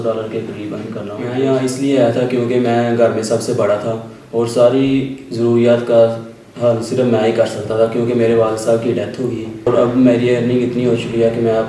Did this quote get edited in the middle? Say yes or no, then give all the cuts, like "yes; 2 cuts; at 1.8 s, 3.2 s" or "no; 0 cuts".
yes; 2 cuts; at 1.2 s, 9.7 s